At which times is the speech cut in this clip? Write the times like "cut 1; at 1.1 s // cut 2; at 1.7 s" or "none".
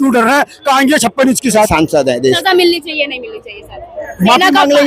cut 1; at 1.7 s